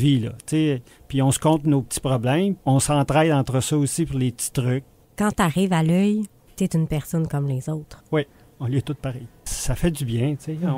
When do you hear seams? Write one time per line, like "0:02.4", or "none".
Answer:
0:02.6
0:05.0
0:09.5